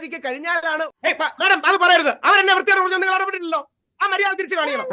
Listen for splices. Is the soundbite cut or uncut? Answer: cut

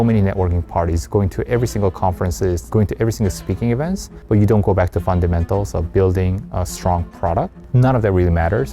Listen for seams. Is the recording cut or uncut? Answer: cut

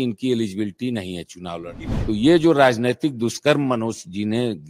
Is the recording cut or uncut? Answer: cut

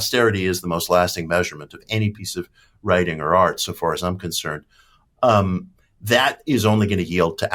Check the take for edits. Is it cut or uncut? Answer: uncut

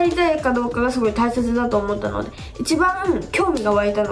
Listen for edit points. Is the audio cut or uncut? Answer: uncut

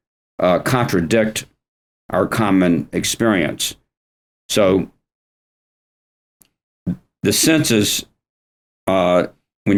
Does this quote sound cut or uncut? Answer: uncut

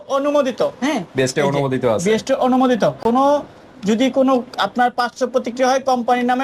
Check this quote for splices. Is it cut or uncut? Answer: uncut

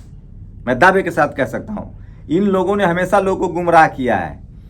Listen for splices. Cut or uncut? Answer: uncut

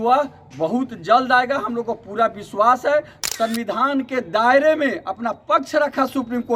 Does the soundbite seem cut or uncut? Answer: cut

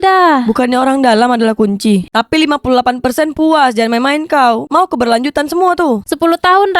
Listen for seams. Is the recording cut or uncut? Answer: cut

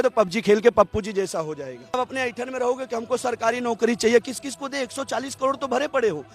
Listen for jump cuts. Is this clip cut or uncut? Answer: cut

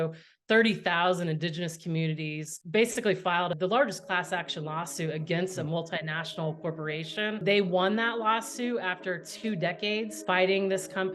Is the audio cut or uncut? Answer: cut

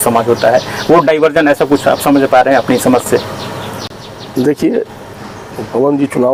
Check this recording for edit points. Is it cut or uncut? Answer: uncut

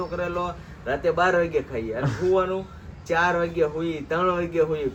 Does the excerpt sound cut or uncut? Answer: uncut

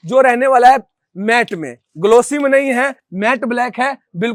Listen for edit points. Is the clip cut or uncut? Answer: uncut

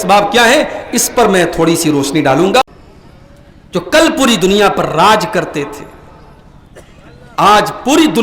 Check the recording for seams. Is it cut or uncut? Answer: cut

